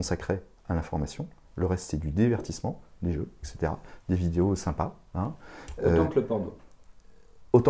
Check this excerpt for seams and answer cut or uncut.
uncut